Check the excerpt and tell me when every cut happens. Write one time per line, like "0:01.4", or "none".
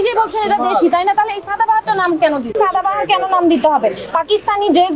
0:02.6